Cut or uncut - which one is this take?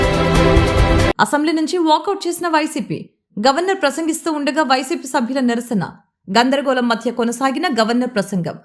cut